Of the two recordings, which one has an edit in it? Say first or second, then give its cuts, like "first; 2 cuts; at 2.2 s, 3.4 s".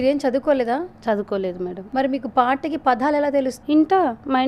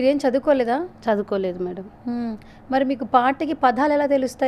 first; 2 cuts; at 1.8 s, 3.5 s